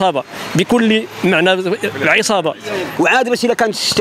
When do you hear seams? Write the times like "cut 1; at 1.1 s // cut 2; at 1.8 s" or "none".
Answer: cut 1; at 2.8 s